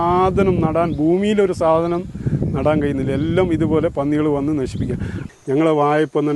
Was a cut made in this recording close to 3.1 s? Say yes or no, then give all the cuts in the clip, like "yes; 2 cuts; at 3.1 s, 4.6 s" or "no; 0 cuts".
no; 1 cut; at 5.2 s